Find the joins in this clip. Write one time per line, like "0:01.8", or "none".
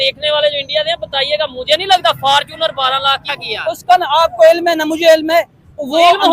0:03.5

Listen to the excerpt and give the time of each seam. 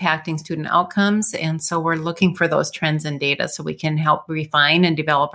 none

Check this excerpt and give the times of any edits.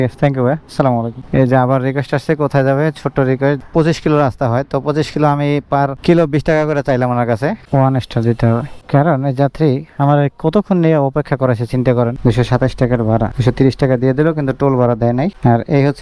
0:01.2
0:03.6
0:07.7
0:12.2

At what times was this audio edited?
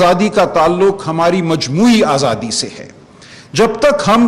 none

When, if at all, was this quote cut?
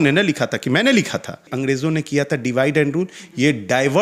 0:01.4

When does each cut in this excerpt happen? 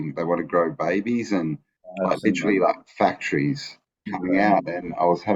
0:04.1

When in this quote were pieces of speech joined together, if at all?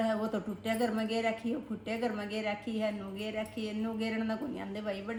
none

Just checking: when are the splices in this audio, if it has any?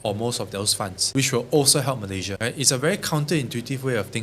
0:01.0
0:02.3

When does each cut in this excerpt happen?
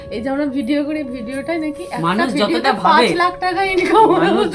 none

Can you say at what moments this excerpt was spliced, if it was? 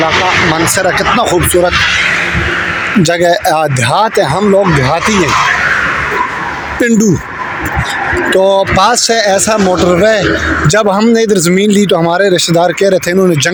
none

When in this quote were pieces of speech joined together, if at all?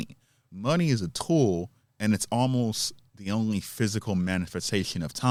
none

